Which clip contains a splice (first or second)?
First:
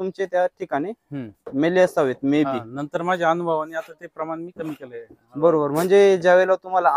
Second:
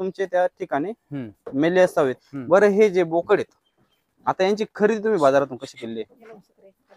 second